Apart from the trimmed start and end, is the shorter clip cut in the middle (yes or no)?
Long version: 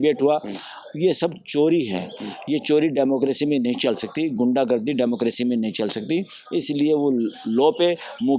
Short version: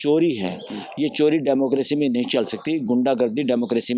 no